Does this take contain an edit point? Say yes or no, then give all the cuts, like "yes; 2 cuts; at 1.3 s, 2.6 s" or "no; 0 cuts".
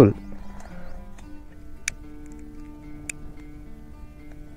yes; 1 cut; at 1.4 s